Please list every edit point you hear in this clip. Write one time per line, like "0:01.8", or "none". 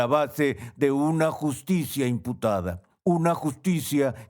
0:02.8